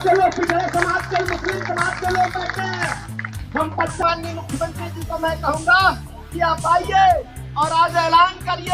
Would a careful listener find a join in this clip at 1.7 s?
no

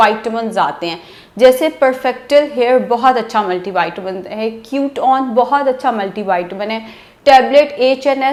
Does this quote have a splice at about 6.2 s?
no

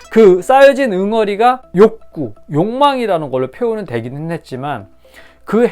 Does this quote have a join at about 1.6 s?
yes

